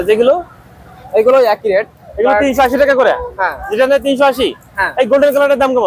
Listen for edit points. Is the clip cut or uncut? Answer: uncut